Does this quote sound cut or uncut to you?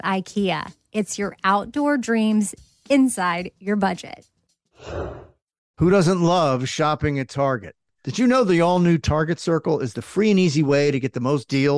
cut